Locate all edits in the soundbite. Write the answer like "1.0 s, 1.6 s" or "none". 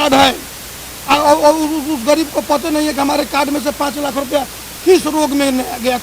none